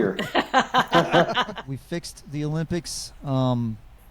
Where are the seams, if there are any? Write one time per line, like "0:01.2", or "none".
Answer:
0:01.6